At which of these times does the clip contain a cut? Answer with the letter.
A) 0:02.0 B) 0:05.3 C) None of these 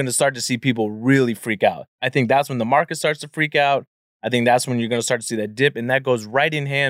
A